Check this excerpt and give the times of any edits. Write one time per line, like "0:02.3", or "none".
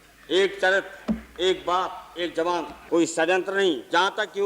0:02.8